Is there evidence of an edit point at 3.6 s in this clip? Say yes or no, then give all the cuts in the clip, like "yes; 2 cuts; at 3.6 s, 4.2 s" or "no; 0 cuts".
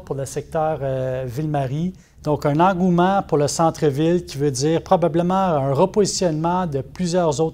no; 1 cut; at 2.1 s